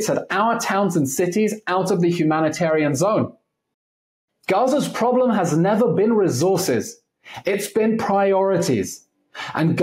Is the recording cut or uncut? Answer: cut